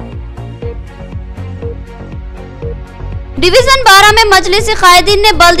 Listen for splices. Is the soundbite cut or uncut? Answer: uncut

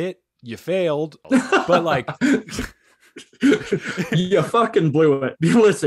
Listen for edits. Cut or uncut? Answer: cut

